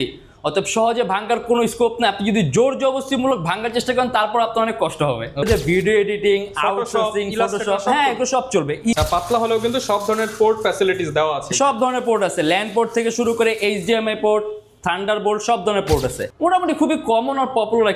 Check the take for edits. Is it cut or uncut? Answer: cut